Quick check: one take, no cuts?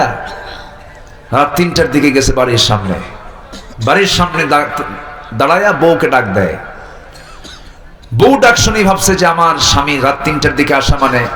yes; 0 cuts

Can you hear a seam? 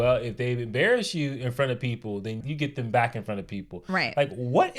yes; 1 cut; at 2.4 s

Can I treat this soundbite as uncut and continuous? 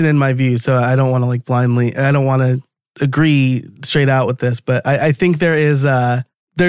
yes; 0 cuts

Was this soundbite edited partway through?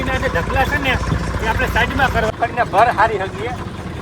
yes; 1 cut; at 2.3 s

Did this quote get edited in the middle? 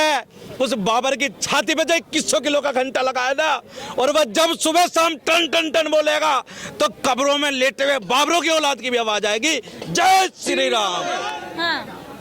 yes; 1 cut; at 11.3 s

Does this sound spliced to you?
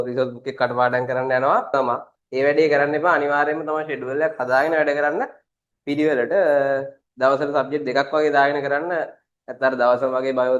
no; 0 cuts

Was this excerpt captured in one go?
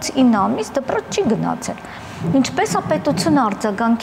yes; 0 cuts

